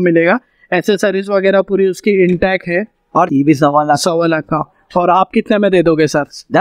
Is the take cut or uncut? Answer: cut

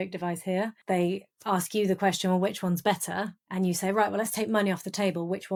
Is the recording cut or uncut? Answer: uncut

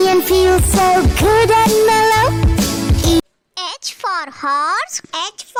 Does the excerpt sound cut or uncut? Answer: uncut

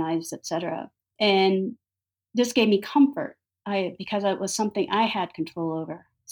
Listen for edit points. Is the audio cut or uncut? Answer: cut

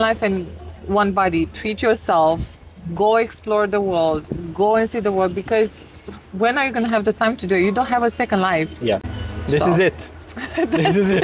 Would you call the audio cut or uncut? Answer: uncut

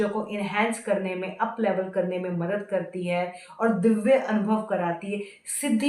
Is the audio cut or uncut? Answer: uncut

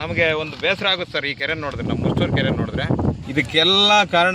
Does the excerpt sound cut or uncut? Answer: cut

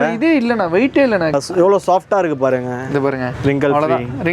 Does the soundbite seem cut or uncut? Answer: cut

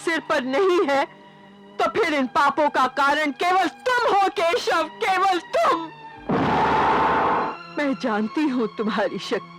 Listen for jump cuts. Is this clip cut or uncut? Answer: cut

